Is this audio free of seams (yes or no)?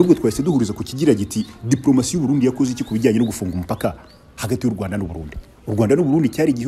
yes